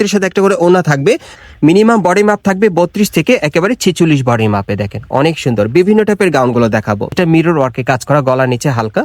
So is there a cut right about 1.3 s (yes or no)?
yes